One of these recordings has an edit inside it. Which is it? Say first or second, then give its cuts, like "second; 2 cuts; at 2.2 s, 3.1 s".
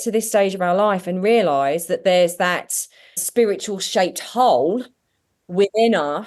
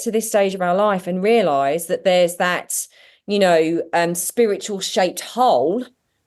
first; 1 cut; at 3.2 s